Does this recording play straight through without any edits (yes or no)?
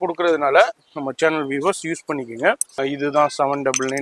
no